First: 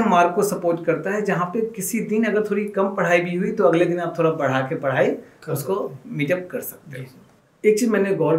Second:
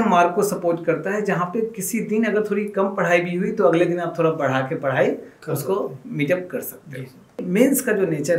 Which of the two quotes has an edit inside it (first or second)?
second